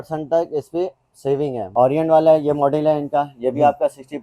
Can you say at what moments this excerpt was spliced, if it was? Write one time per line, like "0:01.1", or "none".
0:01.7